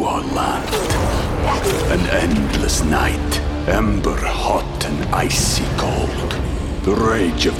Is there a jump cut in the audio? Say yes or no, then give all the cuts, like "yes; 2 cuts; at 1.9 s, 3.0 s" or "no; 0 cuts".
no; 0 cuts